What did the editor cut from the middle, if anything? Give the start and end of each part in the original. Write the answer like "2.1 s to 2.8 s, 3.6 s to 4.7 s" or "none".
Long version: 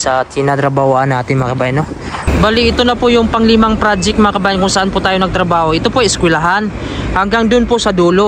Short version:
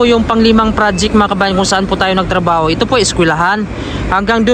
none